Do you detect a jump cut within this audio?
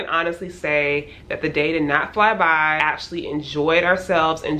yes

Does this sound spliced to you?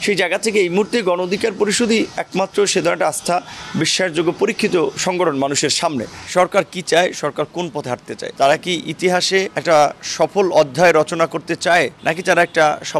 yes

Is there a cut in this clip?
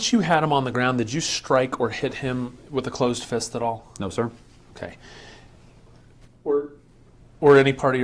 no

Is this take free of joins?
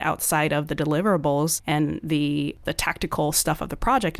no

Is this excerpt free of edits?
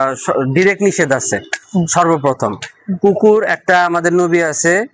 yes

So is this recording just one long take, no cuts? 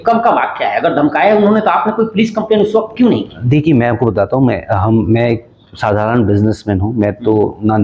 yes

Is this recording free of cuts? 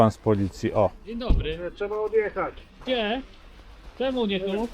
no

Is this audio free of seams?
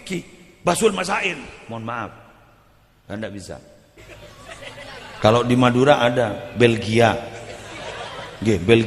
no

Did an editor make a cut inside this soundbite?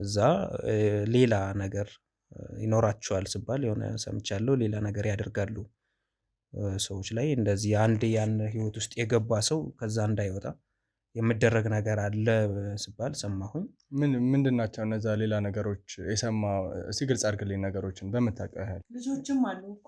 yes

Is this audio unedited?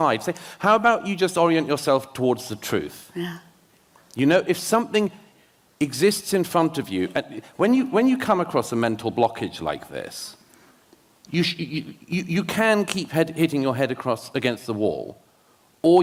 yes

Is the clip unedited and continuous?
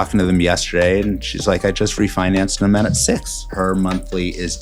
no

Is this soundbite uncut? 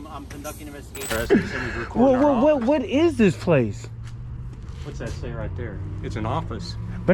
no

